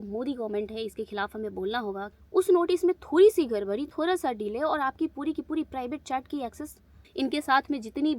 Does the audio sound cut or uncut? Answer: cut